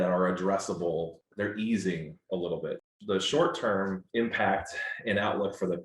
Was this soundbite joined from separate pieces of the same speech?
yes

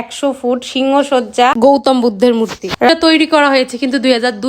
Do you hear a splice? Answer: yes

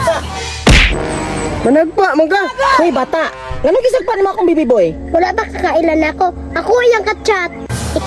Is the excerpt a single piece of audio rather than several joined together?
yes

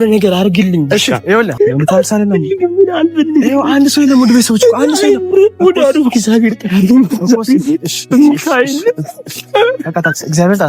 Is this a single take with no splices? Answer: no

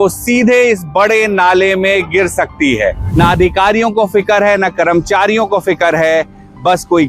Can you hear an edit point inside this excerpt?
yes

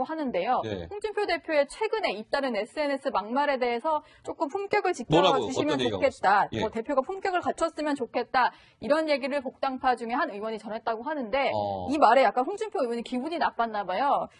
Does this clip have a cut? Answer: yes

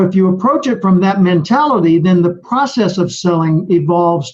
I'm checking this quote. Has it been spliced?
no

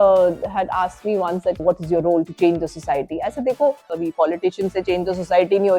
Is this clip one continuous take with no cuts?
no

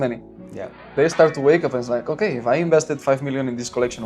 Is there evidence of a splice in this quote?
yes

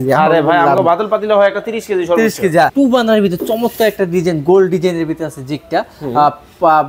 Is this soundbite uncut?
no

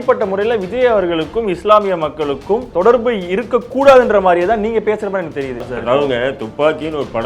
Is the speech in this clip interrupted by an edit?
yes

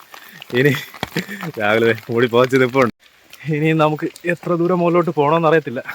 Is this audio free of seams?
no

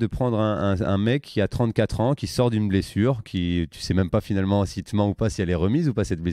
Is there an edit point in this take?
no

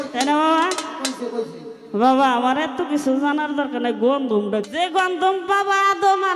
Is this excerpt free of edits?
no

